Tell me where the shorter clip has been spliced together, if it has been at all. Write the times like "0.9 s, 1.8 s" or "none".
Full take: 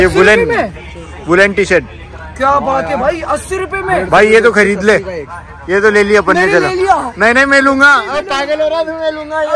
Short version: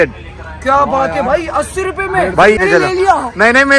2.6 s